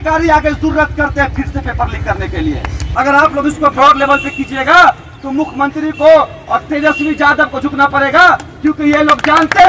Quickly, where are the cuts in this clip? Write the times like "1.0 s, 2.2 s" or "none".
2.8 s